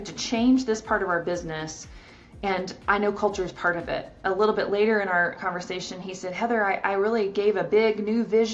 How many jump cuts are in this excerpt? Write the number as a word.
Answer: zero